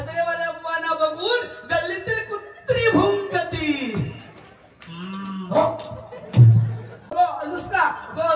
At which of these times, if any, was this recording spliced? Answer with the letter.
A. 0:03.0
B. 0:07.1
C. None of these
B